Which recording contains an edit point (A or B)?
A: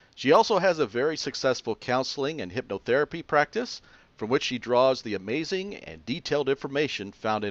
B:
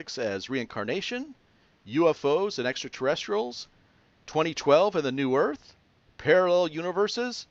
B